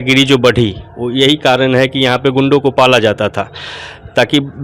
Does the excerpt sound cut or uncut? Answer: uncut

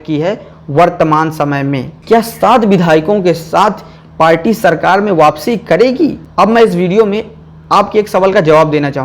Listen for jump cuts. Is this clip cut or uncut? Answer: cut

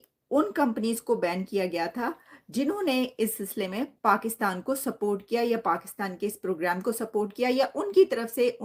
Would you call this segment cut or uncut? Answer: uncut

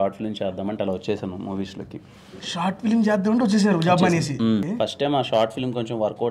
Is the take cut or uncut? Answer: cut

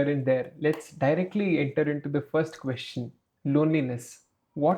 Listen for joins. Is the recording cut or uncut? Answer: uncut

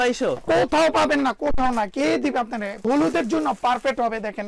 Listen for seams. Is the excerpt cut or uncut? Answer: cut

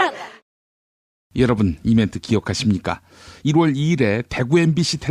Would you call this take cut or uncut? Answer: uncut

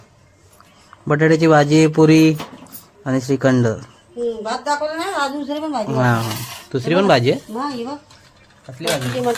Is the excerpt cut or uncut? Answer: uncut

